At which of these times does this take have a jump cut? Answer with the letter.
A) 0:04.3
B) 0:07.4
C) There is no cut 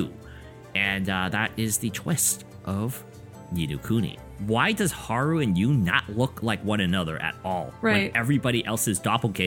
A